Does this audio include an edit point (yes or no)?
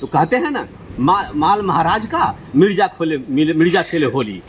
no